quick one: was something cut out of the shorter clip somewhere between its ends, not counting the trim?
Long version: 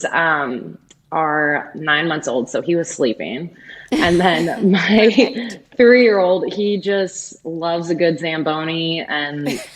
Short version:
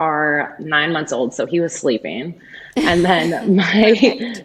no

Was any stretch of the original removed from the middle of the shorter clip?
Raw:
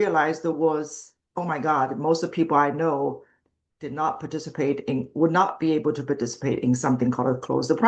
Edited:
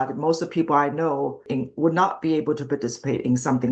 yes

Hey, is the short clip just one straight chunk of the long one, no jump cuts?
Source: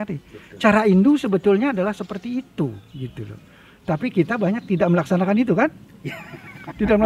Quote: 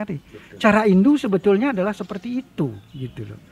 yes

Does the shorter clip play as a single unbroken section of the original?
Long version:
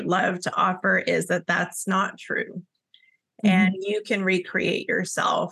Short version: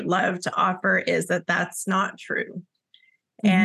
yes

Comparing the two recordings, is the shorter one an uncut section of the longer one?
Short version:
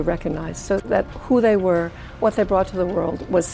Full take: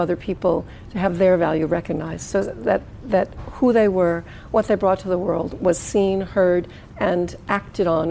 no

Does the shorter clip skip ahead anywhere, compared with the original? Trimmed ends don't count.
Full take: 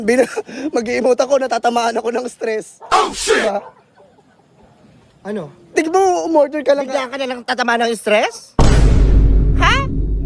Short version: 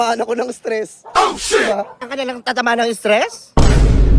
yes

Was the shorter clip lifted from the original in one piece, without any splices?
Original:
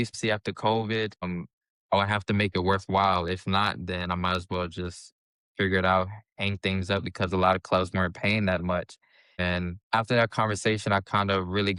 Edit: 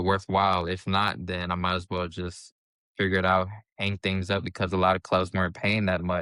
yes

